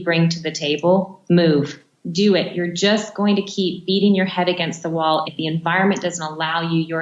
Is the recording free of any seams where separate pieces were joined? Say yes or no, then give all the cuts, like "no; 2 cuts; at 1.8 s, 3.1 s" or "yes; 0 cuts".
no; 3 cuts; at 1.2 s, 1.9 s, 5.2 s